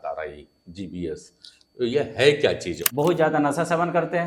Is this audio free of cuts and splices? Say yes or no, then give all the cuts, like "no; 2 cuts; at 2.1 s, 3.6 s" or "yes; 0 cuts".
no; 1 cut; at 2.8 s